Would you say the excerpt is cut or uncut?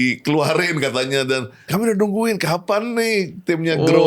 cut